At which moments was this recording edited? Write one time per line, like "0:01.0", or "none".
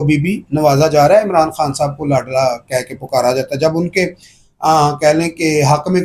none